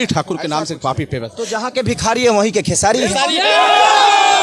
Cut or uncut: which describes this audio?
uncut